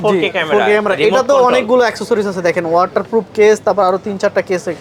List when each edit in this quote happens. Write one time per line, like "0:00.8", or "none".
none